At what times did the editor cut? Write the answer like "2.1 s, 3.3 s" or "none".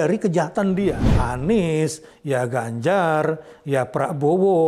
1.2 s